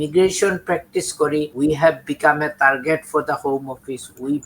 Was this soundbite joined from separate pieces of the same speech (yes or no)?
yes